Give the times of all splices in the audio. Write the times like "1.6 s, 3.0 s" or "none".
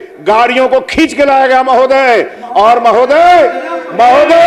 none